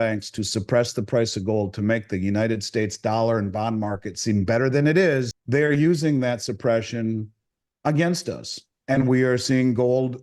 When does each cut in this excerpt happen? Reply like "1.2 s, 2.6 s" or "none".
5.4 s